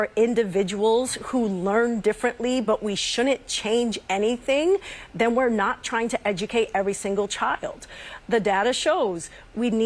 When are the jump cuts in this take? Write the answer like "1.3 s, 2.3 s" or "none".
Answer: none